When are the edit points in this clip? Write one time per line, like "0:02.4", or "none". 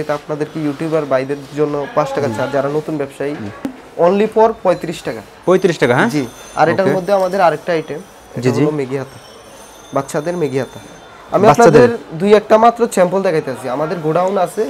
0:03.7